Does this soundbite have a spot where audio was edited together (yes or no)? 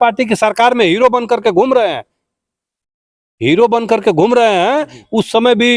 no